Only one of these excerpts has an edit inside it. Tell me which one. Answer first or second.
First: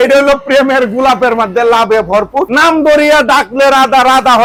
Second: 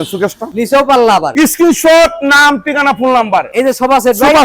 second